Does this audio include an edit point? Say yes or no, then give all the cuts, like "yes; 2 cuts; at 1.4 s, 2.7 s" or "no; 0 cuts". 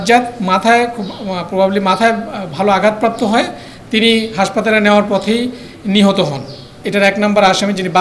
yes; 1 cut; at 6.7 s